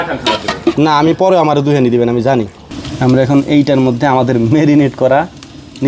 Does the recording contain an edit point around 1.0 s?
no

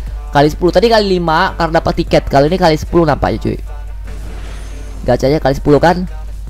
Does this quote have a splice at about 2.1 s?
no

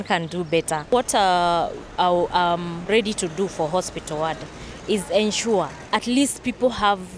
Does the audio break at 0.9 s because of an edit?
yes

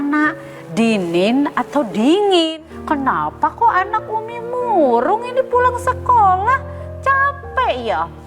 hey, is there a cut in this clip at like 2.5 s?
yes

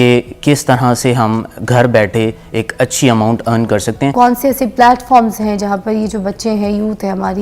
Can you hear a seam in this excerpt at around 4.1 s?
yes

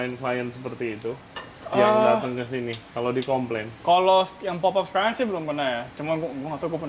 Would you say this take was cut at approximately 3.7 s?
no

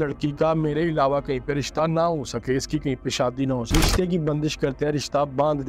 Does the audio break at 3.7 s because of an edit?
yes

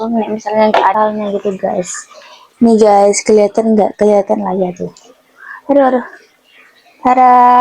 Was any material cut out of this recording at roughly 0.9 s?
yes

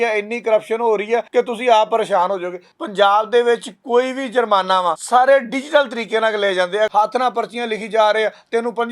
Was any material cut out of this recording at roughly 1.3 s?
yes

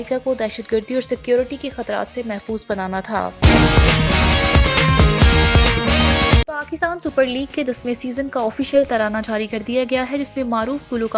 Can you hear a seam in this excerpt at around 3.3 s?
yes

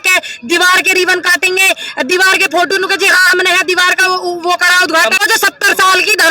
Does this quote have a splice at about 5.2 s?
yes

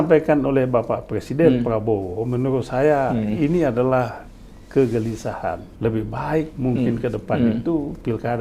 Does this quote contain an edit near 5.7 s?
yes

